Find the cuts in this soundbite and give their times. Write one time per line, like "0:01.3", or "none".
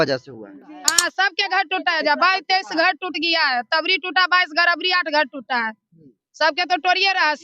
0:00.9